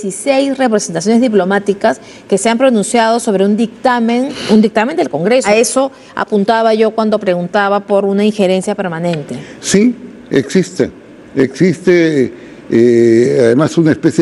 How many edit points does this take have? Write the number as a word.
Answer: two